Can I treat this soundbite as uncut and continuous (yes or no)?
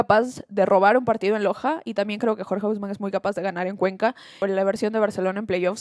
no